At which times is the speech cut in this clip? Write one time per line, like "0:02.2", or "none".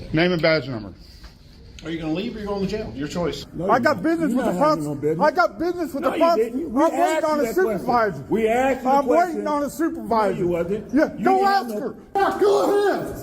0:03.4
0:12.2